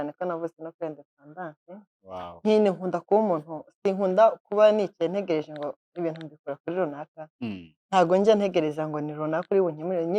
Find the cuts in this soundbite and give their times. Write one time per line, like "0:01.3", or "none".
none